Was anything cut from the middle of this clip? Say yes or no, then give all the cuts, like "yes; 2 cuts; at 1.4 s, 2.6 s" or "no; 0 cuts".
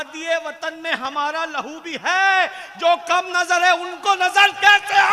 no; 0 cuts